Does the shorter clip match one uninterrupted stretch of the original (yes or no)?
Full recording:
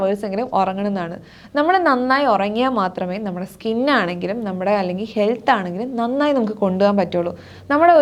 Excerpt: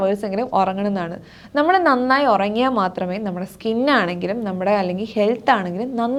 yes